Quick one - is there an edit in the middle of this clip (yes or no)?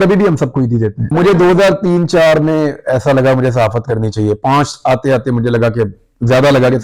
yes